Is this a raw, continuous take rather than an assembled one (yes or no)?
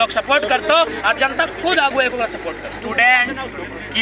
no